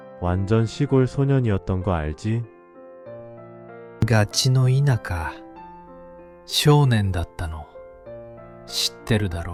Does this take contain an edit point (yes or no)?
no